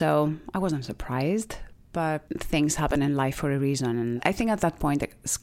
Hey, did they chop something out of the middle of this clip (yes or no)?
yes